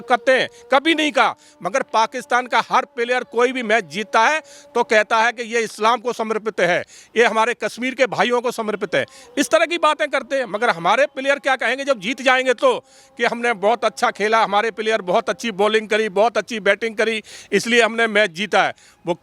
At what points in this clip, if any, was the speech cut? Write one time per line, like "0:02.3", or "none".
none